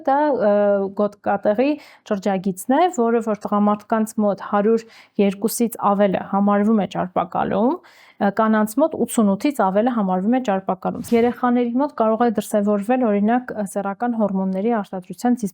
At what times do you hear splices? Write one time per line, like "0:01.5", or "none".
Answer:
0:11.1